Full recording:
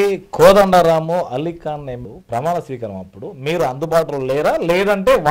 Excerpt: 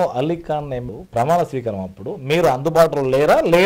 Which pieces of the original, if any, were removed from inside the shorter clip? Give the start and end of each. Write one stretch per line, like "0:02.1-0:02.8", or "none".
none